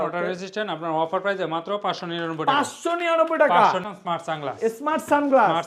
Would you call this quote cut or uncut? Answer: cut